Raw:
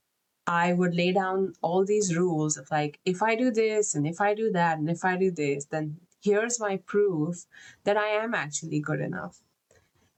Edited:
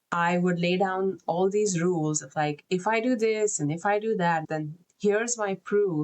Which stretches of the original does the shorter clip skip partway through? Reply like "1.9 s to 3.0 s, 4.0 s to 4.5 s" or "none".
4.8 s to 5.7 s